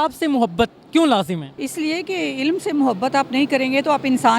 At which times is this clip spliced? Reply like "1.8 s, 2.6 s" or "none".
1.5 s